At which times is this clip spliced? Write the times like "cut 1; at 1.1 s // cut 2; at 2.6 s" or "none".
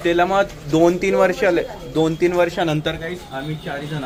none